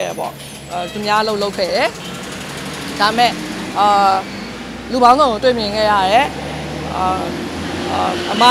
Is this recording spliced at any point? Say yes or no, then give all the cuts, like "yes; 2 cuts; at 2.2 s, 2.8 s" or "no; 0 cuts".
no; 0 cuts